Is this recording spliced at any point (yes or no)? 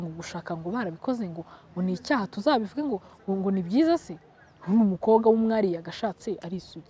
no